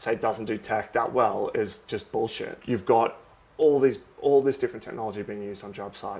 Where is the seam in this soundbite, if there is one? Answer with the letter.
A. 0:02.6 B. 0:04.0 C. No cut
A